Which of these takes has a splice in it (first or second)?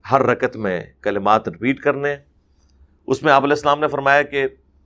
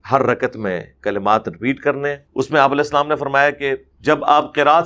second